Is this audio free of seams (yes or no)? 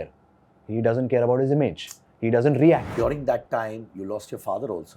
no